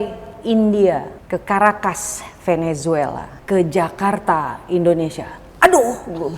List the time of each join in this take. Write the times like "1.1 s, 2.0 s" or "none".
1.2 s, 3.3 s